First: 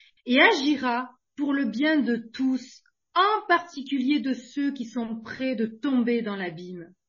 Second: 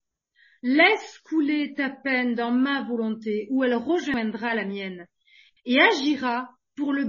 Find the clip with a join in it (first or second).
second